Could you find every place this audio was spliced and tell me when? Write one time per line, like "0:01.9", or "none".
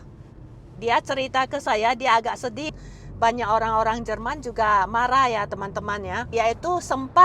0:02.7
0:06.3